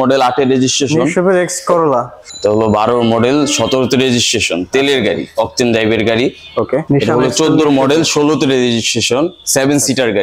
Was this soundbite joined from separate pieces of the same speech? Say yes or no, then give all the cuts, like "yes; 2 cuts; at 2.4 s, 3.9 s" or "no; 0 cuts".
yes; 2 cuts; at 2.2 s, 6.9 s